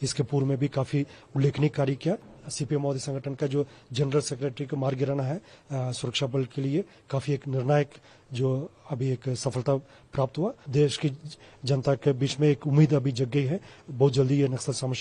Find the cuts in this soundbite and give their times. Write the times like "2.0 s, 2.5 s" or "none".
2.3 s, 10.7 s